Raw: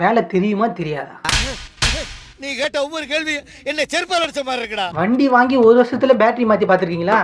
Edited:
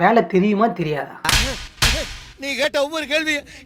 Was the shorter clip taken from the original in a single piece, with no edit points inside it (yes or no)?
yes